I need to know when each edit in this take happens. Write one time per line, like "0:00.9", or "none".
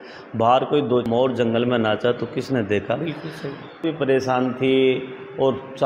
0:01.1
0:03.8